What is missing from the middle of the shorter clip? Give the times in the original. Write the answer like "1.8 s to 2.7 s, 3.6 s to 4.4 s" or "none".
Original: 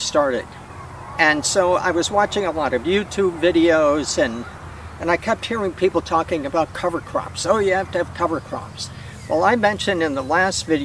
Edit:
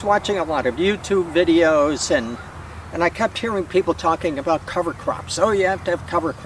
none